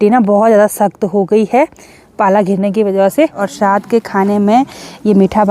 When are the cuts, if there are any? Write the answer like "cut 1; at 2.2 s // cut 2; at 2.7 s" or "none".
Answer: cut 1; at 3.4 s